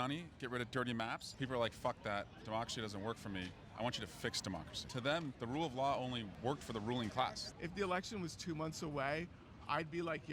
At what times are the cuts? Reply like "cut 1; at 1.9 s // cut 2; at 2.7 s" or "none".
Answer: cut 1; at 1.3 s // cut 2; at 5.1 s // cut 3; at 6.3 s // cut 4; at 7.5 s